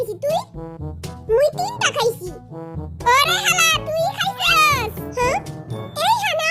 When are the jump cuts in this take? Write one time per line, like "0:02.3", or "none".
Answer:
none